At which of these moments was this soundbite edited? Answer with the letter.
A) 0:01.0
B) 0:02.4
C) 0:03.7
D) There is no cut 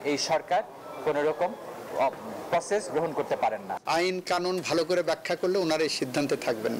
C